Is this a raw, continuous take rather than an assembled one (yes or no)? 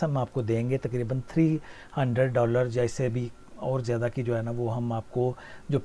yes